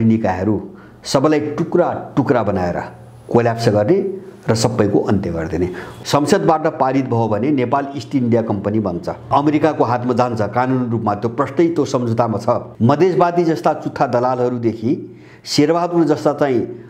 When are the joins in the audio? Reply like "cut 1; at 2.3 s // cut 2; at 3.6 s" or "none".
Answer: cut 1; at 5.8 s // cut 2; at 9.3 s // cut 3; at 12.7 s